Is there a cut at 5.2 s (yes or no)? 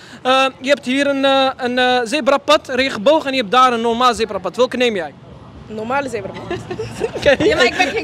no